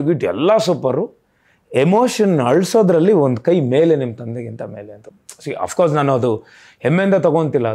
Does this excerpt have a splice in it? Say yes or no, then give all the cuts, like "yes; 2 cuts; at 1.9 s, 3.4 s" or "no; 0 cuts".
no; 0 cuts